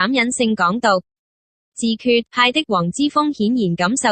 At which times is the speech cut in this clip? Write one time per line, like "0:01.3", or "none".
0:02.0